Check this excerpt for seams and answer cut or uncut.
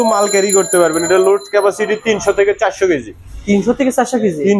uncut